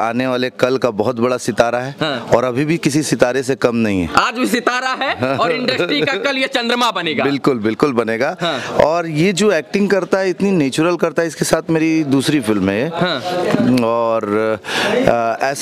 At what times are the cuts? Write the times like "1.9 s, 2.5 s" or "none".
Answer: none